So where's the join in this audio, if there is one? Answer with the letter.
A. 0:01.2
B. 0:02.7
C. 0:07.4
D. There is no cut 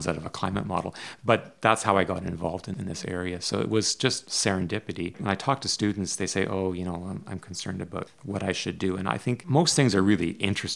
B